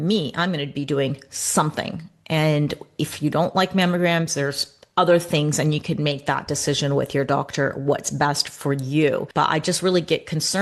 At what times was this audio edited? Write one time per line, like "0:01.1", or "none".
0:09.3